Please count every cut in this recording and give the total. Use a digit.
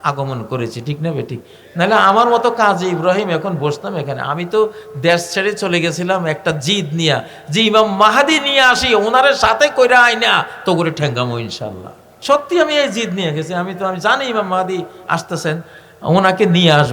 1